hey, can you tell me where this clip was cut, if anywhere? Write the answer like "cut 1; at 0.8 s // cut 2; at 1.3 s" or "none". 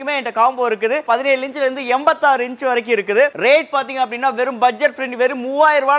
cut 1; at 1.0 s // cut 2; at 3.3 s